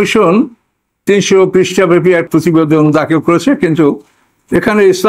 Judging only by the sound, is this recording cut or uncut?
cut